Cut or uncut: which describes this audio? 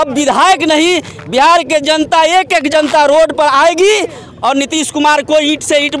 uncut